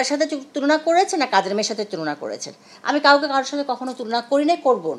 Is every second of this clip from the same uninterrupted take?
yes; 0 cuts

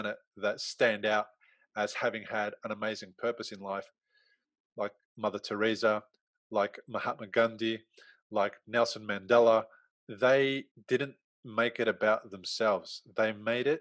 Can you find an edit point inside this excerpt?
yes; 2 cuts; at 9.8 s, 10.7 s

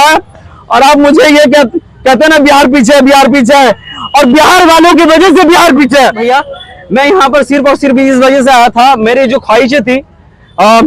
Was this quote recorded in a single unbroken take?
no; 1 cut; at 6.2 s

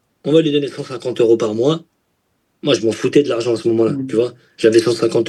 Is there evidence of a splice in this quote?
no; 0 cuts

